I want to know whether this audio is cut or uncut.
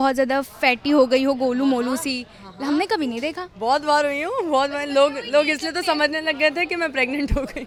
uncut